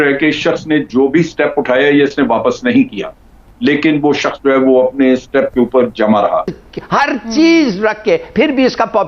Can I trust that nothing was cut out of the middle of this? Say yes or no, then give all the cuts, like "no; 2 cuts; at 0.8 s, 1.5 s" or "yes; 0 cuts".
no; 2 cuts; at 3.4 s, 6.6 s